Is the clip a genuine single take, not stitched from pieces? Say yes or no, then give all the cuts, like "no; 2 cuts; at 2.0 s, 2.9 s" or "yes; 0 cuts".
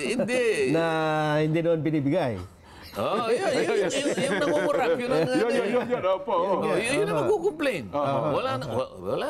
yes; 0 cuts